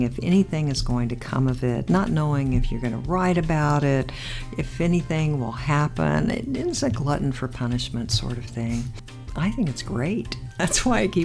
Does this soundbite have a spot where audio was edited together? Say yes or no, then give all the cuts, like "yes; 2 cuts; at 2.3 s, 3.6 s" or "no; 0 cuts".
yes; 1 cut; at 9.1 s